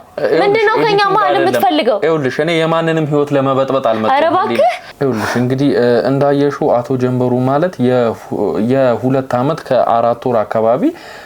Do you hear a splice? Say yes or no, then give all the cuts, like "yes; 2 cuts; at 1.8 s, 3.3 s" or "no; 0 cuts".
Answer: yes; 1 cut; at 4.9 s